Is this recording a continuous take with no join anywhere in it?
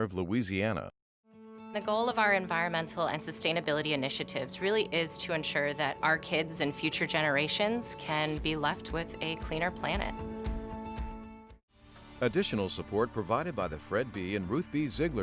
no; 1 cut; at 12.0 s

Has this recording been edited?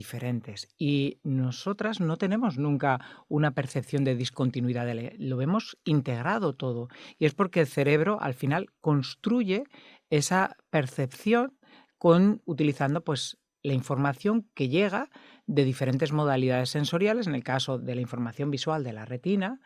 no; 0 cuts

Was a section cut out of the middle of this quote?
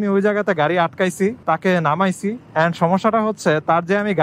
yes; 1 cut; at 1.4 s

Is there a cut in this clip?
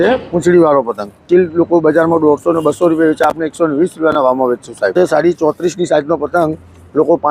yes; 2 cuts; at 1.2 s, 4.9 s

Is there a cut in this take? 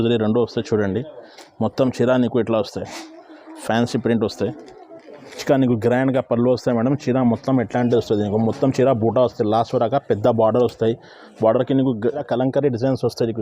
yes; 2 cuts; at 5.4 s, 12.0 s

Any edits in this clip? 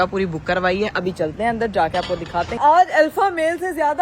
yes; 1 cut; at 2.5 s

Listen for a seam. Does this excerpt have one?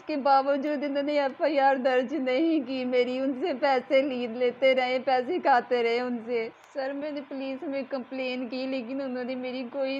yes; 1 cut; at 6.6 s

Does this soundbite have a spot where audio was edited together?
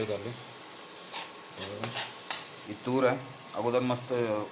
yes; 1 cut; at 2.6 s

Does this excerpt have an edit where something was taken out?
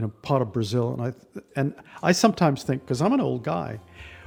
no; 0 cuts

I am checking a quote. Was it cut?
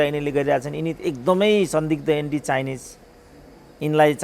no; 0 cuts

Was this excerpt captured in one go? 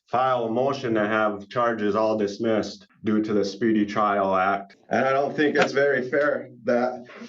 no; 2 cuts; at 2.8 s, 4.7 s

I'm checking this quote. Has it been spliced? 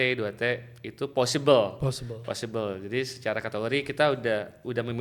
no; 0 cuts

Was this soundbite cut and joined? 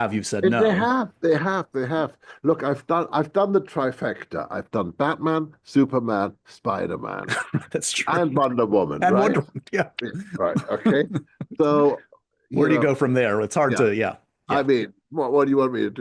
yes; 1 cut; at 2.3 s

